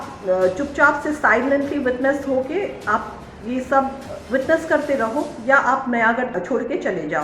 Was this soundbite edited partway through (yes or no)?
yes